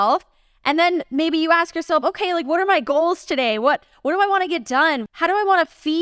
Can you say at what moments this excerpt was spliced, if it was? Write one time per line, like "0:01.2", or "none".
0:05.0